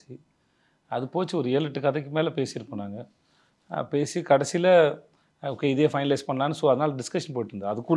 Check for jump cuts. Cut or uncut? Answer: uncut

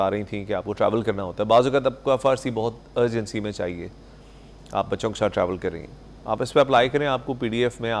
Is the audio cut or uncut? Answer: uncut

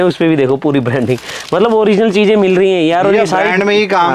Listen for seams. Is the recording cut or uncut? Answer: uncut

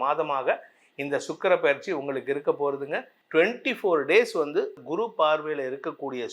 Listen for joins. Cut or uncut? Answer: cut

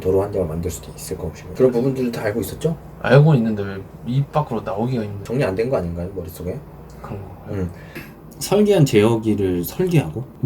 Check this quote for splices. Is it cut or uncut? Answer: cut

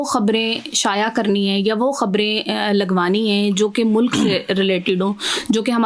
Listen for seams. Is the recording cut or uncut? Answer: uncut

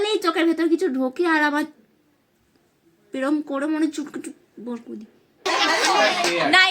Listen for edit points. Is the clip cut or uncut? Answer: cut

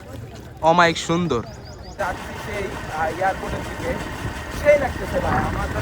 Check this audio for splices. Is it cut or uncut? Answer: cut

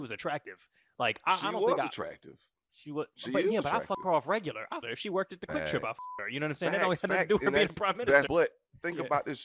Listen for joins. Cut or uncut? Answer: cut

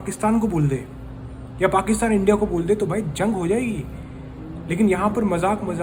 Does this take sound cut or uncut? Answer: uncut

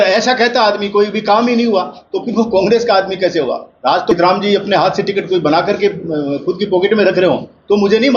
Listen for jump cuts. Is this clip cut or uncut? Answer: cut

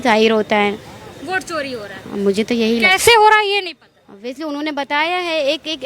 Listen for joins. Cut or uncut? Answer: uncut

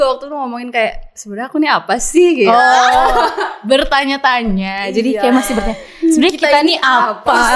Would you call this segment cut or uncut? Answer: uncut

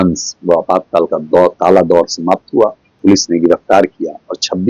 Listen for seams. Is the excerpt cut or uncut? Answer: cut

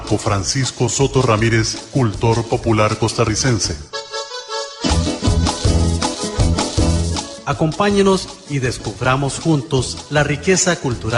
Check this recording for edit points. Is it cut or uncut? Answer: uncut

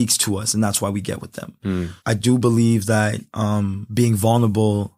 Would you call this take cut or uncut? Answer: cut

